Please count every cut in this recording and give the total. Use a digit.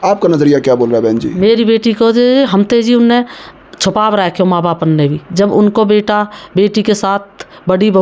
0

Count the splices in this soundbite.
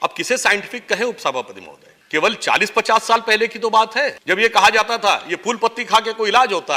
0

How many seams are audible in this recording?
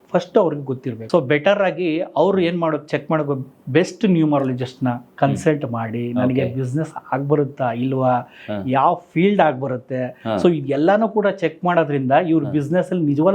1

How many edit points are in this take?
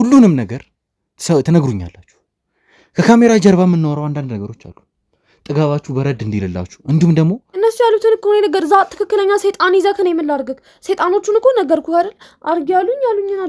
1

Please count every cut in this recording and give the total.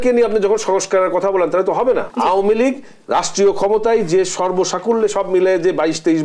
1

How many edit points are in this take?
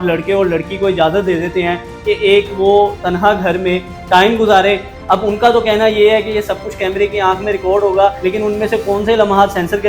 2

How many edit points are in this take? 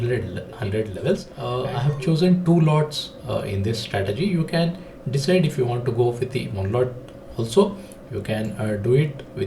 1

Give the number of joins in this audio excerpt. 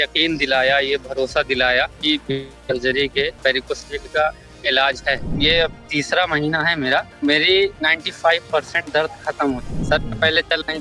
5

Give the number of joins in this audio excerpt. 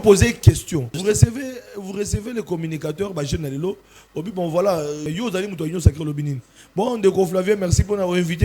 2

